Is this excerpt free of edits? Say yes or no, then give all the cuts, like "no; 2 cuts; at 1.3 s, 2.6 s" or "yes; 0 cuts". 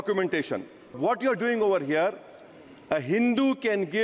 no; 1 cut; at 1.0 s